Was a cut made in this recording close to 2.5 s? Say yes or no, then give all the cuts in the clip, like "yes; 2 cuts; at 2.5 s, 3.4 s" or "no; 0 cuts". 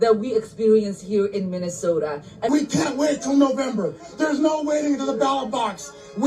yes; 1 cut; at 2.5 s